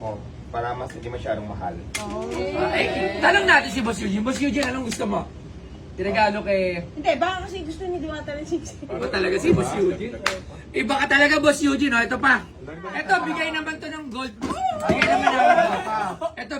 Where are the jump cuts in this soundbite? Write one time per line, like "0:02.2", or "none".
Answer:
0:08.9
0:12.8